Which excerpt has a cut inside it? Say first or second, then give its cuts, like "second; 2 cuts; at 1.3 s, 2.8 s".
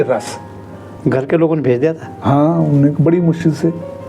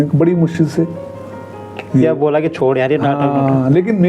first; 1 cut; at 0.9 s